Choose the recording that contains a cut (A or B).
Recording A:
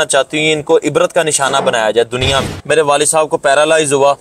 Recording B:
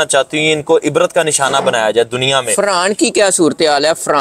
A